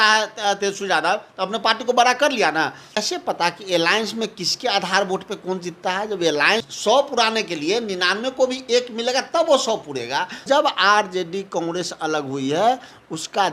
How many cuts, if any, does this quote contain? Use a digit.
3